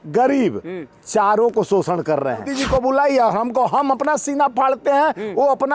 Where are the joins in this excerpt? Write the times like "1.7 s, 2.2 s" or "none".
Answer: 2.5 s